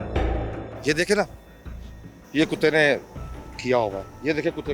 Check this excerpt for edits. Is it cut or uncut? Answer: uncut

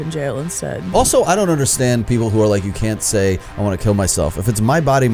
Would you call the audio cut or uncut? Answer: cut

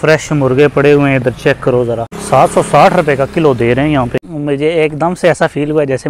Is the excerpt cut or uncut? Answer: cut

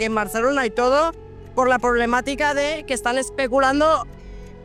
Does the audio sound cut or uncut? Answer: uncut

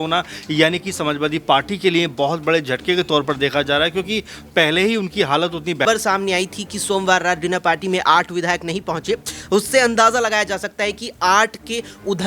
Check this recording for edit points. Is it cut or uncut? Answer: cut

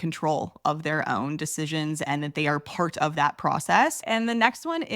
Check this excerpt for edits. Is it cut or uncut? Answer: cut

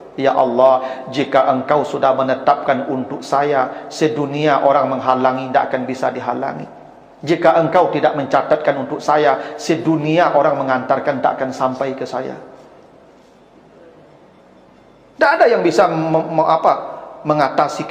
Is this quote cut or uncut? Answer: uncut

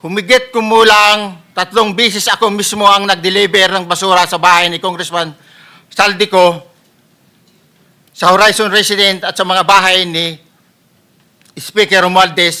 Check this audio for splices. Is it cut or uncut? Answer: uncut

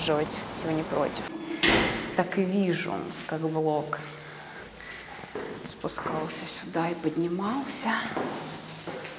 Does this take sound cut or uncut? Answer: cut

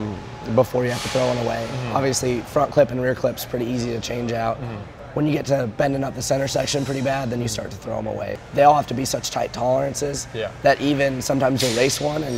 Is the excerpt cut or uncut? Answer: cut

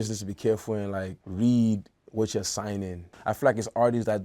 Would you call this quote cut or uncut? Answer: cut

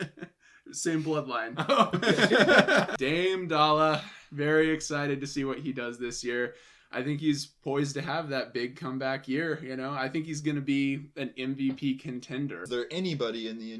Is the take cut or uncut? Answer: cut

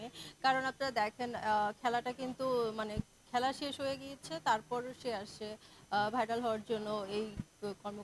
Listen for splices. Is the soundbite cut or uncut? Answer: uncut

